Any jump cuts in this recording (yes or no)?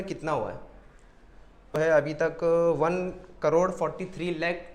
yes